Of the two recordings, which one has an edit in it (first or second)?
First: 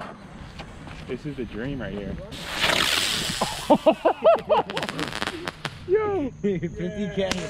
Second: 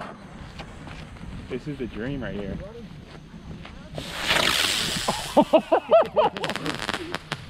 first